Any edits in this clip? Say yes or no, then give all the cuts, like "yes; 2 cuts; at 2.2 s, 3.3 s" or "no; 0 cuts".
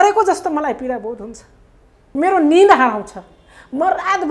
yes; 1 cut; at 2.0 s